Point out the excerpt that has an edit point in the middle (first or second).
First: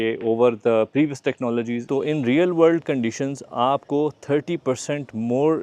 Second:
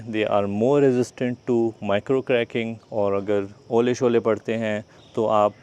first